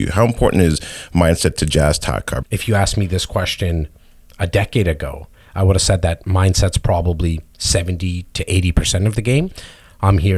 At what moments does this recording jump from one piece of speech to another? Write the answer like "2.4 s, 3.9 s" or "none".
2.4 s